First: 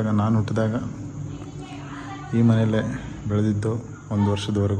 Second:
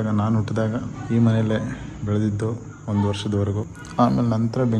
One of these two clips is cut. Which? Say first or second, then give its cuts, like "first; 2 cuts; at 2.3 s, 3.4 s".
second; 2 cuts; at 1.0 s, 3.7 s